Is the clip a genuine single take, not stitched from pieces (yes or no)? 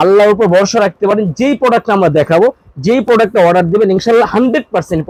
yes